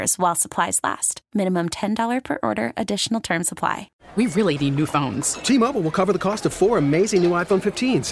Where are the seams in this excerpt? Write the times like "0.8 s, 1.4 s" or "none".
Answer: 4.0 s